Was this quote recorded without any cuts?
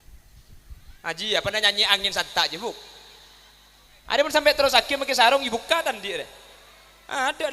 yes; 0 cuts

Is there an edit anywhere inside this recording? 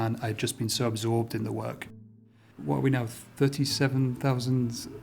yes; 1 cut; at 2.4 s

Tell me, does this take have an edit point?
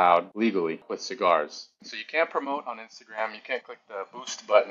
yes; 1 cut; at 1.9 s

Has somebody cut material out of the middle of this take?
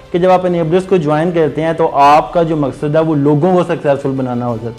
no; 0 cuts

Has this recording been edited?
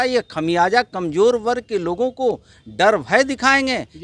no; 0 cuts

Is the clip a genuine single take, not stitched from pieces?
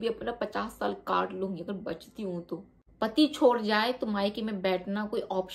no; 1 cut; at 2.8 s

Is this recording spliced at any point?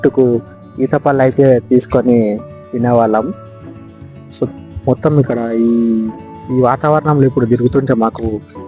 no; 0 cuts

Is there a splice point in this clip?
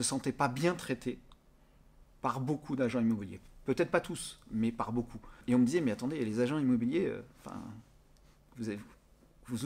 yes; 1 cut; at 5.4 s

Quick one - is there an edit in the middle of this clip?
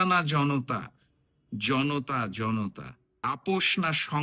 yes; 1 cut; at 3.2 s

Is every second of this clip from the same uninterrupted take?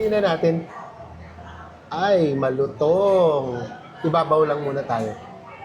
yes; 0 cuts

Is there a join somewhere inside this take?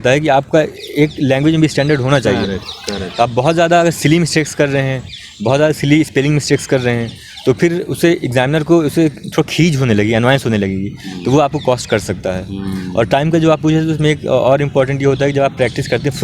no; 0 cuts

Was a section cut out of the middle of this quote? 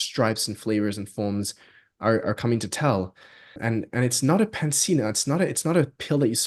yes; 1 cut; at 3.6 s

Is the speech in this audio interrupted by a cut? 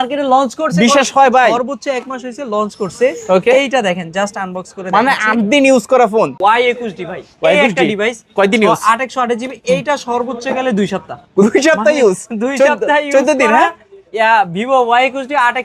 yes; 1 cut; at 6.4 s

